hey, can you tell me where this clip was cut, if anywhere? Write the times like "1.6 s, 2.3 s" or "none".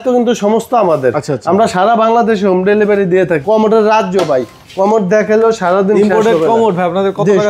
3.4 s